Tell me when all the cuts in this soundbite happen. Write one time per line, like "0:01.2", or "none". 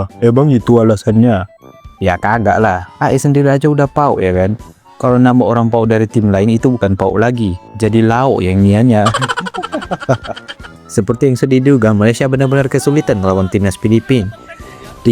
0:10.7

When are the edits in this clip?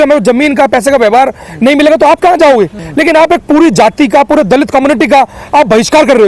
0:02.8

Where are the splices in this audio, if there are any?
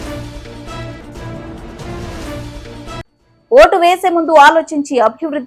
0:01.2
0:03.0

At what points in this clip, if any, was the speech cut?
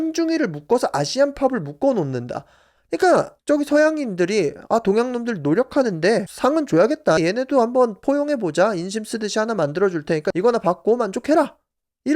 none

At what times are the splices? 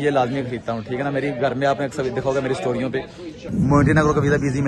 0:03.4

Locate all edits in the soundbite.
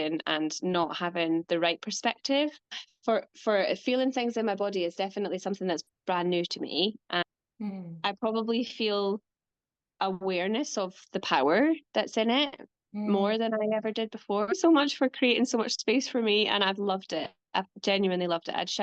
0:02.7
0:07.2
0:14.5

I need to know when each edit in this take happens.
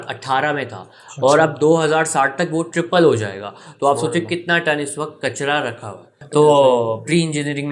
0:06.2

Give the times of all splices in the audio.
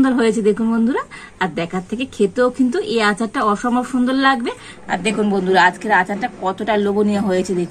0:04.7

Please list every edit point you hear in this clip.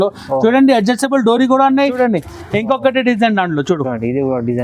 0:02.0

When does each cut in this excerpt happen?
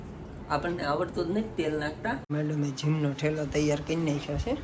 0:02.3

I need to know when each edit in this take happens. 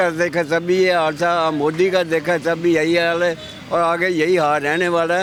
none

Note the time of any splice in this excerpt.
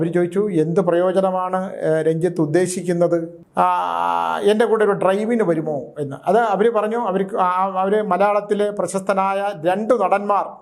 0:03.4

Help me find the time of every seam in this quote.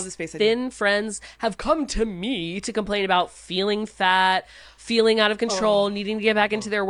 none

